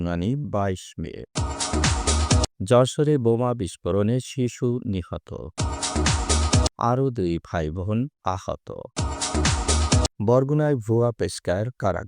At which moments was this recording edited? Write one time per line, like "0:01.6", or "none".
0:08.1